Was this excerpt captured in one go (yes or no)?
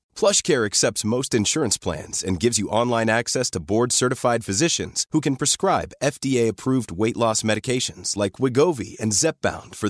yes